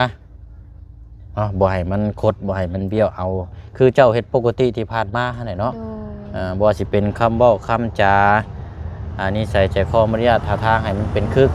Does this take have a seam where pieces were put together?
no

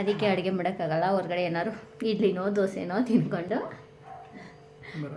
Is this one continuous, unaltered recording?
yes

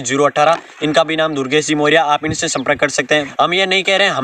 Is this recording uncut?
no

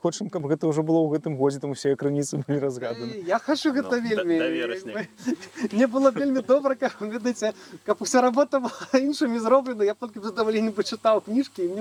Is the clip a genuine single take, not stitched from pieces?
yes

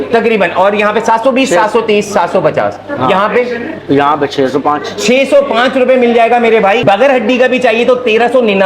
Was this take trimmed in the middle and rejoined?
yes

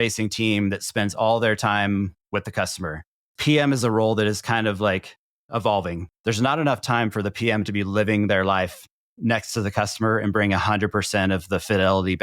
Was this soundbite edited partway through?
yes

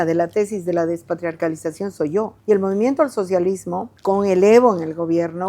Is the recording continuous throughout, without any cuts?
no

